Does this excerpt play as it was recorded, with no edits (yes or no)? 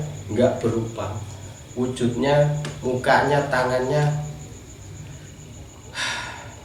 yes